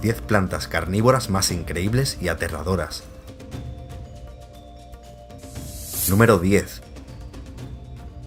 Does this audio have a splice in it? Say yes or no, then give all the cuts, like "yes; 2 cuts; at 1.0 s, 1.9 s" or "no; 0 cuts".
no; 0 cuts